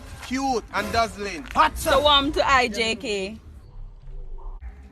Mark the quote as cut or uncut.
cut